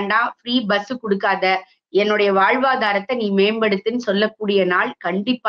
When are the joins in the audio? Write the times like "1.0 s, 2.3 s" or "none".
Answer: none